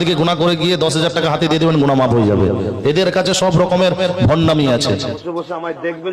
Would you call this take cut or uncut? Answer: cut